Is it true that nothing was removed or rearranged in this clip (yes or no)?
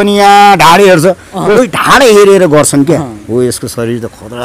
no